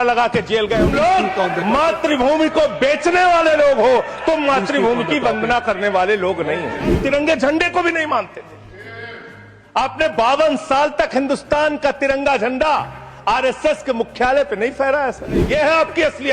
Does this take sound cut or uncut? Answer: cut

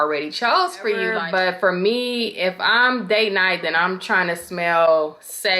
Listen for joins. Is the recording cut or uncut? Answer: cut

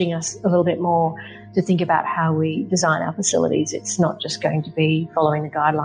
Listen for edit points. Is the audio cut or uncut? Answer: uncut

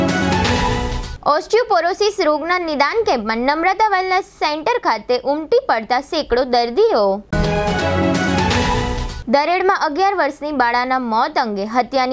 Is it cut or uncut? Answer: cut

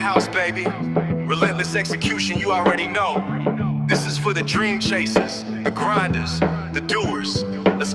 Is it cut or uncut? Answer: uncut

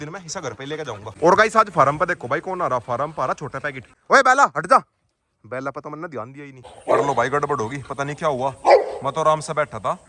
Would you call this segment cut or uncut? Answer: cut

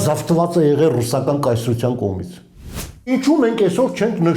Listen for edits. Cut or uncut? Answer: cut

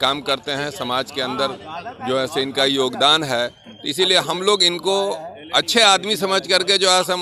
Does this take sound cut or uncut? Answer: uncut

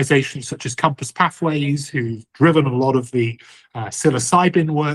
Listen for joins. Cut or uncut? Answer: uncut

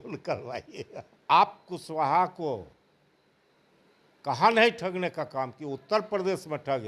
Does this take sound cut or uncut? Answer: cut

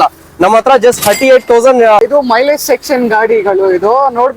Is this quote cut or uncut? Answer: cut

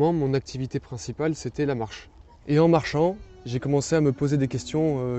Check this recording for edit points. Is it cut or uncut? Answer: uncut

